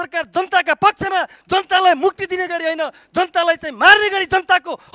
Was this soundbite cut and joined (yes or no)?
no